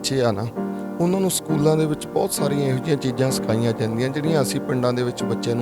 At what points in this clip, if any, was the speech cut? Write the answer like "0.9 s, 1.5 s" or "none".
none